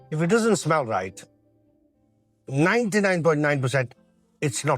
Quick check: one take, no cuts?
yes; 0 cuts

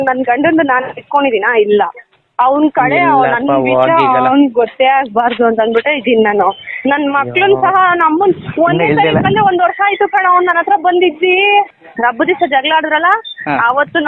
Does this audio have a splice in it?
yes; 1 cut; at 11.8 s

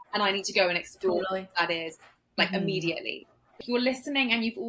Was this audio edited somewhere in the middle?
yes; 1 cut; at 3.4 s

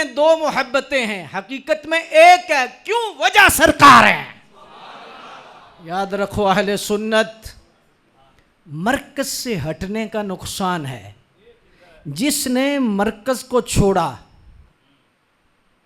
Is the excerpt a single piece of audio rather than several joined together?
no; 1 cut; at 5.7 s

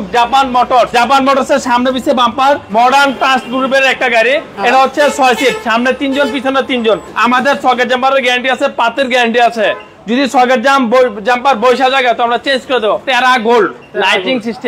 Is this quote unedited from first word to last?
no; 3 cuts; at 2.6 s, 7.1 s, 13.0 s

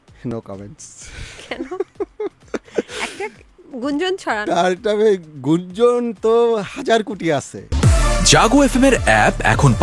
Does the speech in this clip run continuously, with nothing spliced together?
no; 1 cut; at 7.6 s

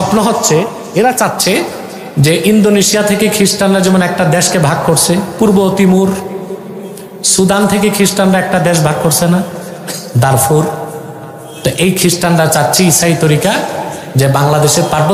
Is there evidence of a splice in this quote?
no; 0 cuts

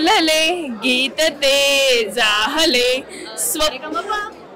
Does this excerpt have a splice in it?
no; 0 cuts

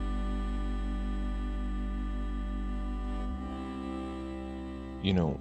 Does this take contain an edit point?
no; 0 cuts

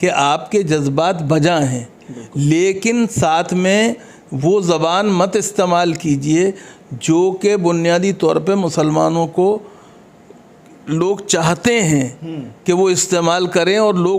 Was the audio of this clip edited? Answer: no; 0 cuts

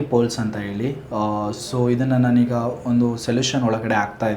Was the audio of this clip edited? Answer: no; 0 cuts

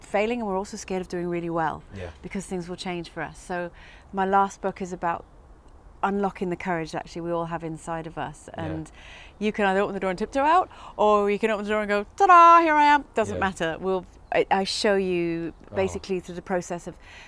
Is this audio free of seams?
yes; 0 cuts

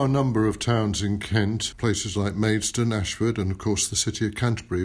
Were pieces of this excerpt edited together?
yes; 1 cut; at 1.6 s

